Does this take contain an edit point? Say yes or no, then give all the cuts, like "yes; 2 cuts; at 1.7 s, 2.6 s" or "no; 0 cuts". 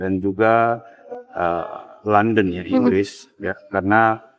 no; 0 cuts